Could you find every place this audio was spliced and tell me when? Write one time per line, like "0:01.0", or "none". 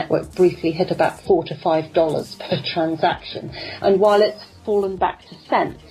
0:04.5